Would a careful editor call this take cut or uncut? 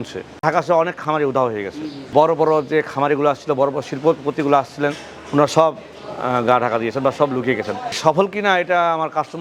cut